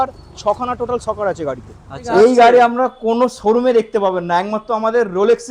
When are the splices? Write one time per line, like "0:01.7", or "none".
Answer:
0:02.0